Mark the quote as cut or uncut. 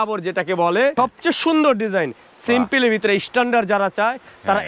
cut